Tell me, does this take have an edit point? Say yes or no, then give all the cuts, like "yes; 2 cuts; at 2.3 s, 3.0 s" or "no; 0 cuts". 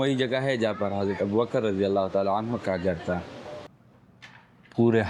yes; 1 cut; at 3.7 s